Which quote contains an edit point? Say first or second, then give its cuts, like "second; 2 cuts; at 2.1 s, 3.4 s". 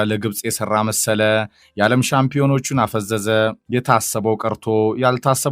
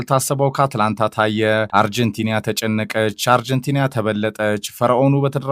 second; 1 cut; at 1.7 s